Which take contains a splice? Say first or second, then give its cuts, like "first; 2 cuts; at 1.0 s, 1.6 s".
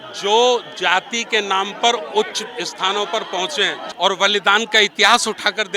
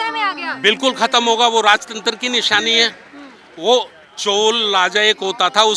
first; 1 cut; at 3.8 s